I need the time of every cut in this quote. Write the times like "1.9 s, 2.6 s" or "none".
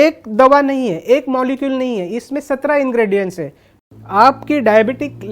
3.7 s